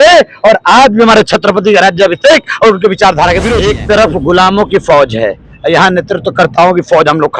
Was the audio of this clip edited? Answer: yes; 1 cut; at 3.6 s

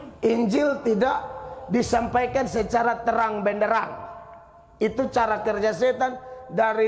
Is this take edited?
no; 0 cuts

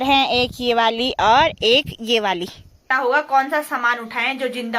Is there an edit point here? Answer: yes; 1 cut; at 2.9 s

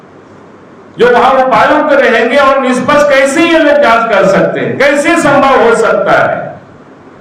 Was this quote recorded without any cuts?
yes; 0 cuts

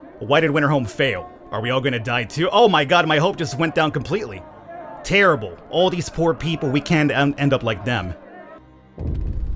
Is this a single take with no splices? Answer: no; 1 cut; at 8.6 s

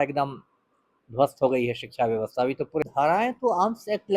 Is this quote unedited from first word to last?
no; 1 cut; at 2.8 s

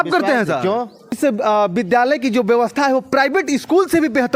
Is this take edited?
yes; 1 cut; at 1.0 s

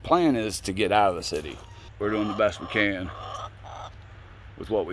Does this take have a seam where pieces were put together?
yes; 1 cut; at 1.9 s

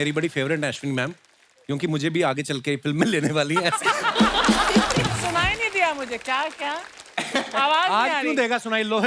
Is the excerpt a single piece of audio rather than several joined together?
no; 1 cut; at 5.2 s

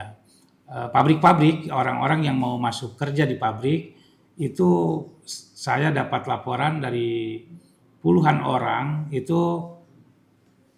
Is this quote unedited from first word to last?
yes; 0 cuts

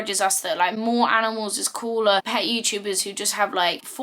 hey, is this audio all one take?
no; 1 cut; at 2.2 s

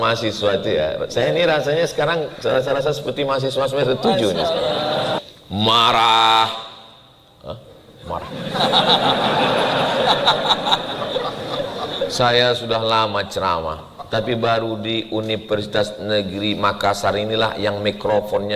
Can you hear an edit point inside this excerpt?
yes; 1 cut; at 5.1 s

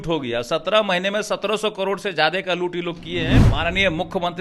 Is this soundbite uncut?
no; 1 cut; at 3.4 s

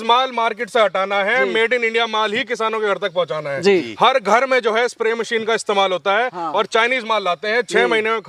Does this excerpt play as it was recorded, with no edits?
yes; 0 cuts

